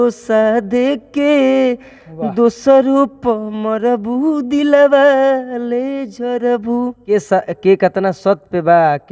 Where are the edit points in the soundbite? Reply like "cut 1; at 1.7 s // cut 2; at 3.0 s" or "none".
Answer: cut 1; at 7.0 s